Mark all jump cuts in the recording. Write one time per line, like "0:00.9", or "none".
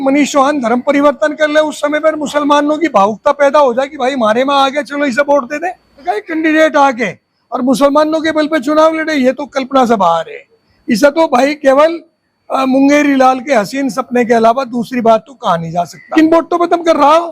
0:06.1
0:16.0